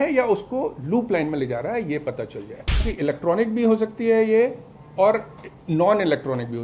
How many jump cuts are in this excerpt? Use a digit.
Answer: 1